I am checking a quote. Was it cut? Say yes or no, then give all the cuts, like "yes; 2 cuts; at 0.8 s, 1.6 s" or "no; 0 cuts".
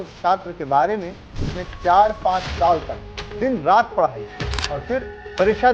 yes; 1 cut; at 4.6 s